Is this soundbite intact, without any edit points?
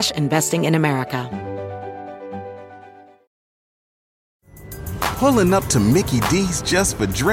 no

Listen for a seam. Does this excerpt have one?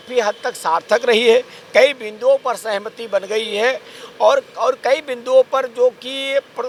no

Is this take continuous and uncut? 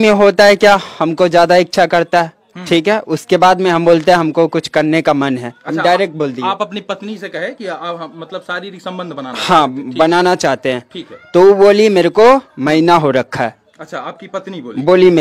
yes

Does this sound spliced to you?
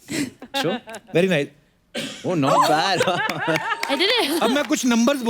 yes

